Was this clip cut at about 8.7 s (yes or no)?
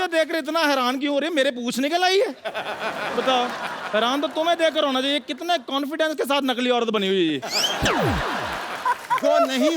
yes